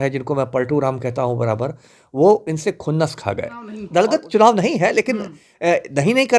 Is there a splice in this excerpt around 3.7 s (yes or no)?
yes